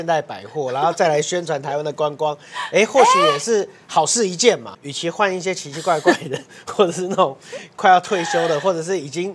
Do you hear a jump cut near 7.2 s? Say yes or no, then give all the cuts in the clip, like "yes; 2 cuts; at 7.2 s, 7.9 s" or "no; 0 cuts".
no; 1 cut; at 4.7 s